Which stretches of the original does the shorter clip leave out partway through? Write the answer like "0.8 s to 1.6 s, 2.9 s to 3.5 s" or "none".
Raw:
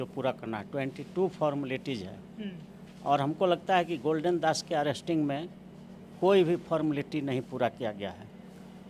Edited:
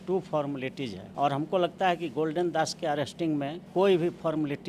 2.1 s to 2.9 s, 5.5 s to 6.1 s